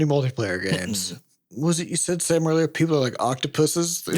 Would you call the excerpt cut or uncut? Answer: cut